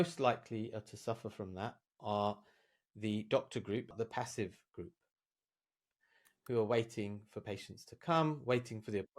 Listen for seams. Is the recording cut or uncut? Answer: cut